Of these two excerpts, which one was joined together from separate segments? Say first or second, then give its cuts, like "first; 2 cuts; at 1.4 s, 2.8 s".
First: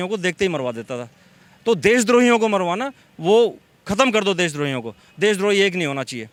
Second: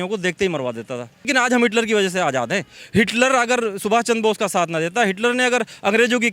second; 1 cut; at 1.3 s